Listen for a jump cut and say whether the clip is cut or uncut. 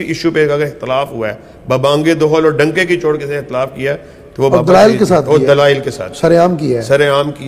uncut